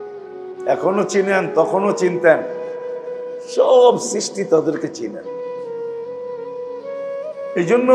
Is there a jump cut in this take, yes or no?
yes